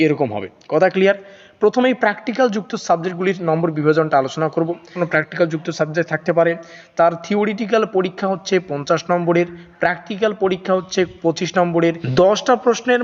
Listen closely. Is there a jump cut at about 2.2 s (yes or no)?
no